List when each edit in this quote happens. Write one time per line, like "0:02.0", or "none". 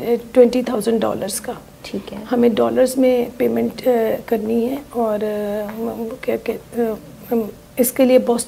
none

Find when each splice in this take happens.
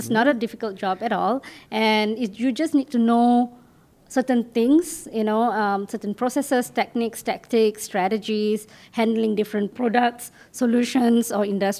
none

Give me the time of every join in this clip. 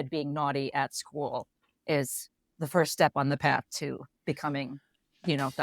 0:02.5

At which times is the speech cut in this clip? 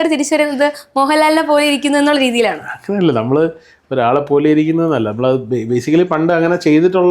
none

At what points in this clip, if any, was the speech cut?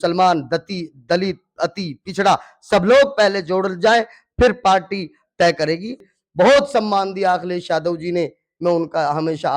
0:06.1

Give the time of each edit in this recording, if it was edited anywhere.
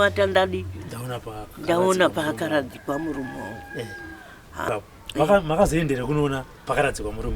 0:04.7

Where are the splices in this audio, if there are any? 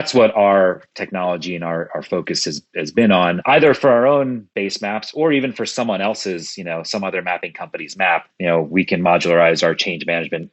0:03.4
0:08.3

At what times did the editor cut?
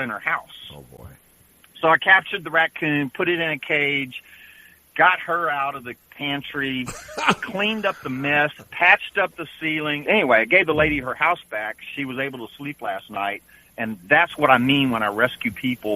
0:10.1

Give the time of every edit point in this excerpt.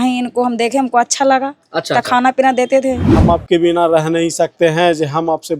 0:03.1

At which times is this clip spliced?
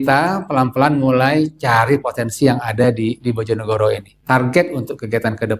0:04.1

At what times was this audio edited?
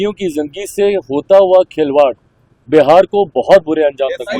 none

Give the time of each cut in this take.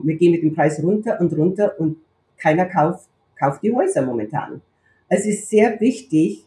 none

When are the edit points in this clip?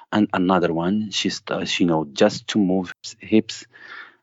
0:02.9

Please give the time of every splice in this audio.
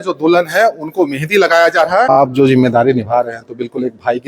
0:02.1

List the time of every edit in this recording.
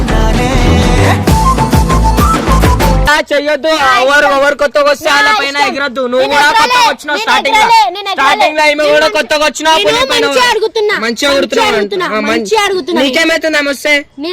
0:03.1

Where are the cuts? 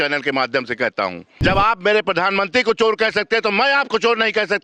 0:01.3

